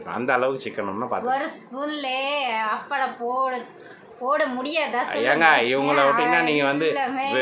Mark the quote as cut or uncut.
uncut